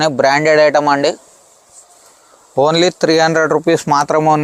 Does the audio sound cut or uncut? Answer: uncut